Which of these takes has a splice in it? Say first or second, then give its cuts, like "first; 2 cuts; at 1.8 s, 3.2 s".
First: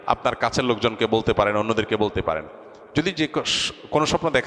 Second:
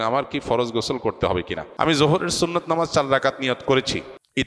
second; 1 cut; at 1.6 s